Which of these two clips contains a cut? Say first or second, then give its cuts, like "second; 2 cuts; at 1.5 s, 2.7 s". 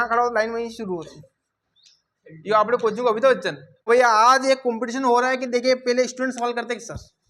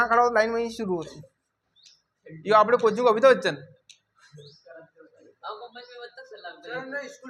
first; 1 cut; at 3.9 s